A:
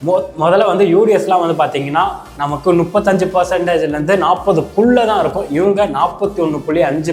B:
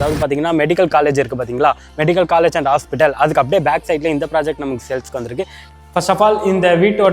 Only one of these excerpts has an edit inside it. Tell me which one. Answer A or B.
B